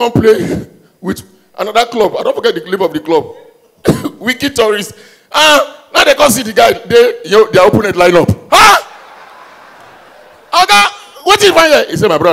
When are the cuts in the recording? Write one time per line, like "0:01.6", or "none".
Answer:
none